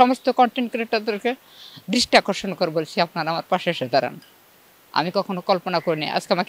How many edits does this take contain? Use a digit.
0